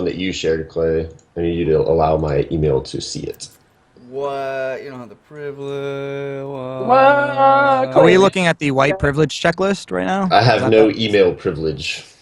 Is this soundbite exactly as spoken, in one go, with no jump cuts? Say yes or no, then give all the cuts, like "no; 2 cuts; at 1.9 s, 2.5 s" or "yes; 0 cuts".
no; 1 cut; at 5.5 s